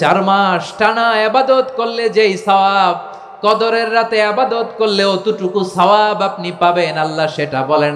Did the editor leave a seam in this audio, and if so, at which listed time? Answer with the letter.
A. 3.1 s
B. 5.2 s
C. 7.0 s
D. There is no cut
D